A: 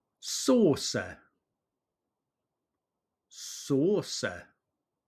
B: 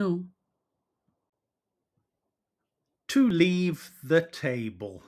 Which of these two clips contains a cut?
B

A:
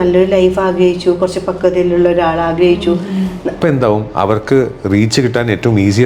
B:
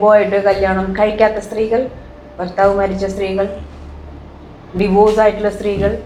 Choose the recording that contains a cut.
A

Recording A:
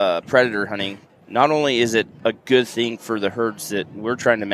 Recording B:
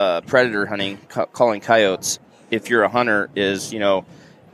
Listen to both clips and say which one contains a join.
A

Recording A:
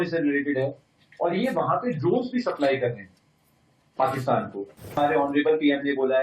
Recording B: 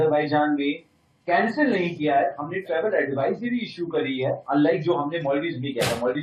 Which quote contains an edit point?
A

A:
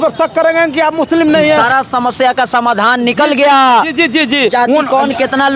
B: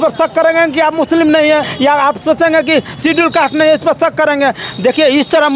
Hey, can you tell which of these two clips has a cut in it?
A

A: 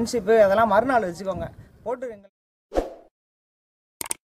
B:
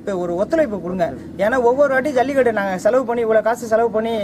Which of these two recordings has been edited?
A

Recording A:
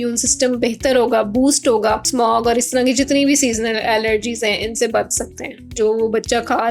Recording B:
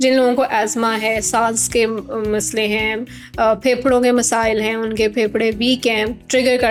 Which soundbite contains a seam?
A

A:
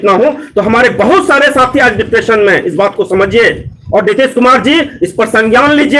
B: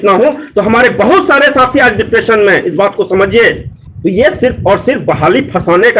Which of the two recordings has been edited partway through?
B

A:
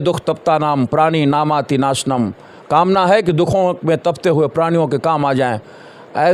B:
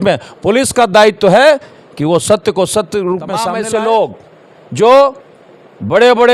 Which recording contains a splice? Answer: B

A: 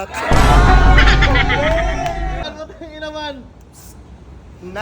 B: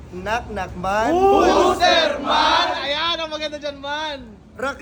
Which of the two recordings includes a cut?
A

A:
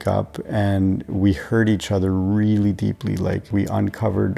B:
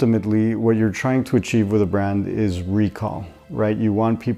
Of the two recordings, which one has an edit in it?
A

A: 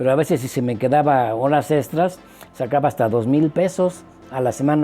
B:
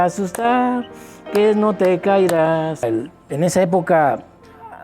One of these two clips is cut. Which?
B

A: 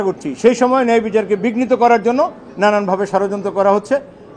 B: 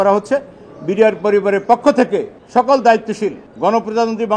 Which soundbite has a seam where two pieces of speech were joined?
B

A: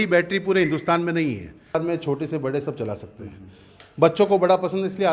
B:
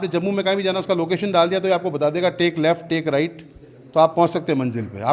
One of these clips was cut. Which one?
A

